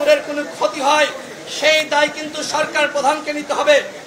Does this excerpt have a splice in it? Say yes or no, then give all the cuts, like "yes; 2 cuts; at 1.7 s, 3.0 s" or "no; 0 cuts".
no; 0 cuts